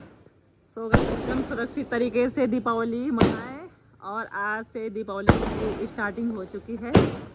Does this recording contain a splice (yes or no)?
no